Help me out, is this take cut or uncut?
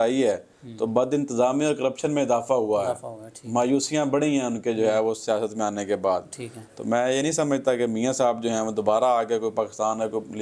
uncut